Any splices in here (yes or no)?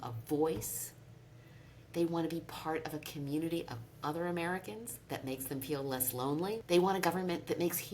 yes